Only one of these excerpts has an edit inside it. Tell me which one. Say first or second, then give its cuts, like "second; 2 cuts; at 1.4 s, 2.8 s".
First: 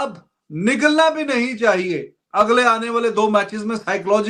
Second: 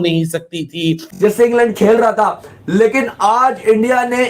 second; 1 cut; at 1.0 s